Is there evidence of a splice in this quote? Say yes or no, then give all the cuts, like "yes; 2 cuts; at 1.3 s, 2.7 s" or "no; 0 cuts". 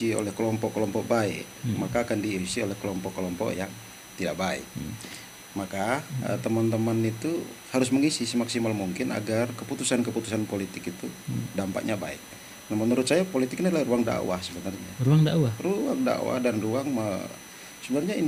no; 0 cuts